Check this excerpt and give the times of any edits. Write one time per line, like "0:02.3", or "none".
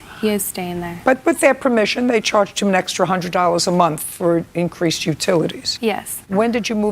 0:01.2
0:05.9